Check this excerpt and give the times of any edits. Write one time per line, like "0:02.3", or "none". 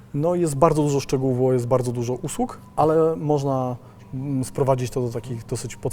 none